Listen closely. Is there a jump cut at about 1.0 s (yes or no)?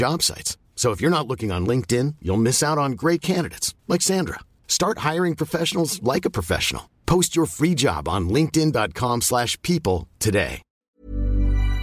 no